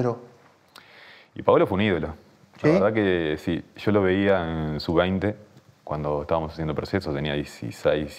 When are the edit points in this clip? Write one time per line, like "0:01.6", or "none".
none